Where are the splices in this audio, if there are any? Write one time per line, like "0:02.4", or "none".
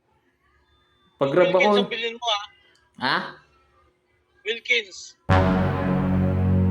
0:05.1